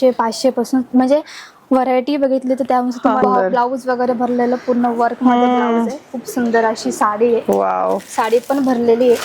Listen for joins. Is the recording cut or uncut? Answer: cut